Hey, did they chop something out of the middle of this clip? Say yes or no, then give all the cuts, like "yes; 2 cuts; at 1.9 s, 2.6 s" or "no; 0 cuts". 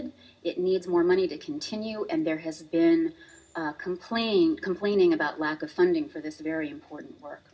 no; 0 cuts